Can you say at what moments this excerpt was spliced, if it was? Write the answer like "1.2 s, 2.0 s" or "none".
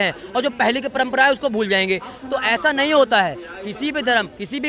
none